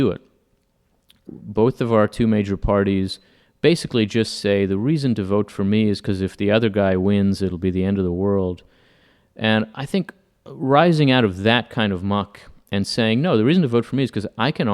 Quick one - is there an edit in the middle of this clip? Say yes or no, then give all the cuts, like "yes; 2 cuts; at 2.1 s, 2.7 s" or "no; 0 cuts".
yes; 1 cut; at 1.2 s